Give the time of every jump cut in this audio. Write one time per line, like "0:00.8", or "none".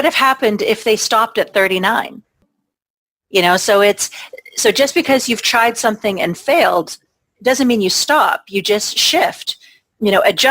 0:02.3